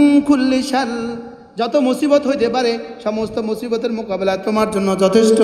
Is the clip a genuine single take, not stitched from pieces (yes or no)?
yes